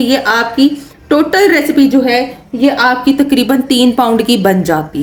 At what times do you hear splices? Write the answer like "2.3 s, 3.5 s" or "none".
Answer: none